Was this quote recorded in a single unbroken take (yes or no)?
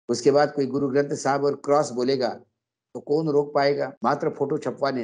no